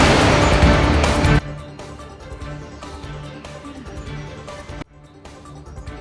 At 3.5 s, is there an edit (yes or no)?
no